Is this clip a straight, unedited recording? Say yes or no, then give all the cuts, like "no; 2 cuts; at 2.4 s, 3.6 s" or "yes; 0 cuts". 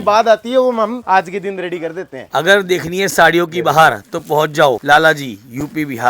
no; 3 cuts; at 1.0 s, 2.3 s, 4.8 s